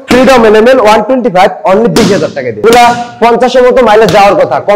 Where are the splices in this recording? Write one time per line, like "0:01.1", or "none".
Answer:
0:02.6